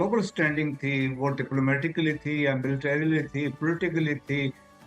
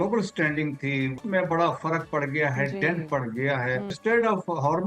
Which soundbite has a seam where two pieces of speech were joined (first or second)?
second